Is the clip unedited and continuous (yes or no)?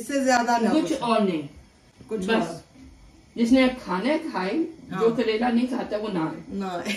yes